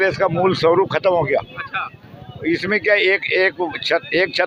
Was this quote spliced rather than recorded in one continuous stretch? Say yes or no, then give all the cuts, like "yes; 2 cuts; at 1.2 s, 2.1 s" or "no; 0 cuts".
no; 0 cuts